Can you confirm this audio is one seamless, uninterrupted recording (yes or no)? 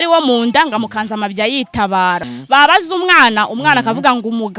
no